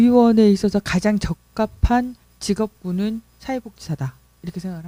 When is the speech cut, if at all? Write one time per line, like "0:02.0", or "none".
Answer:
none